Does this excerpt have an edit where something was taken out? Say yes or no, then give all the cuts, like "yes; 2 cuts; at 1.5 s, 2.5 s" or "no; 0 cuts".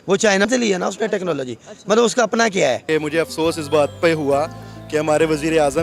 yes; 1 cut; at 2.8 s